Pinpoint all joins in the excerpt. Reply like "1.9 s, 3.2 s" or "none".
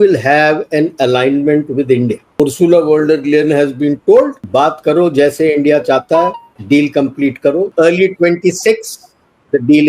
2.4 s, 4.4 s, 6.5 s, 7.7 s